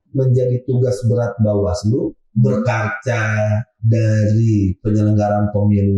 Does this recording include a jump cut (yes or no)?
no